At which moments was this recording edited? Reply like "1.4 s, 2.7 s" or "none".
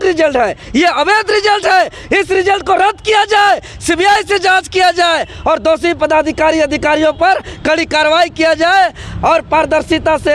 none